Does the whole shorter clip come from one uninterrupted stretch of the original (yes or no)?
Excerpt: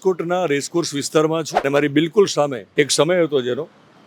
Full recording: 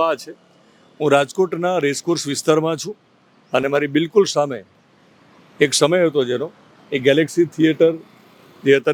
no